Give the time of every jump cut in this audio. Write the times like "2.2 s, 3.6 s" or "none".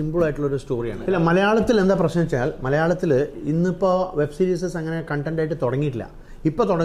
0.9 s